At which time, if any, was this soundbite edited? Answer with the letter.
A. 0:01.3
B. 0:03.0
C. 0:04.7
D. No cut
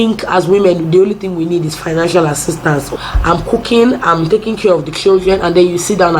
B